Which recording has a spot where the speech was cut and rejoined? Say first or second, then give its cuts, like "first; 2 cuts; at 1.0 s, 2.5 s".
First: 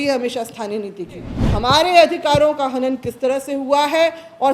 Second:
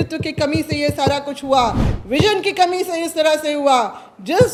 first; 1 cut; at 1.4 s